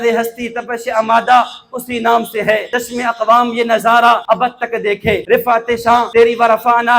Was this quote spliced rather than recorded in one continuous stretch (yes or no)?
yes